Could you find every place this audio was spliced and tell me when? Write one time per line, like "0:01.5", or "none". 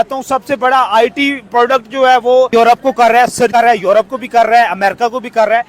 0:02.5